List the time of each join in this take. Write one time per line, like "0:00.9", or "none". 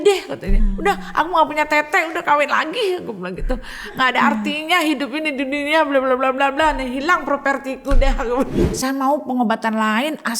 0:08.6